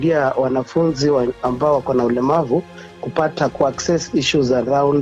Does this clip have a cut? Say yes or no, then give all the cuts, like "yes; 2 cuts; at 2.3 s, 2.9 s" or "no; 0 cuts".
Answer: no; 0 cuts